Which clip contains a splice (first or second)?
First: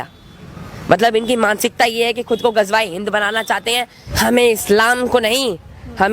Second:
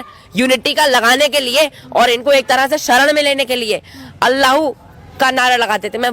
first